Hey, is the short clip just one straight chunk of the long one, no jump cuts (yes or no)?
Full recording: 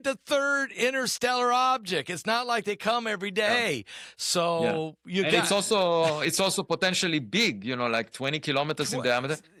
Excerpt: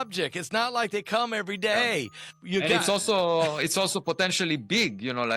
no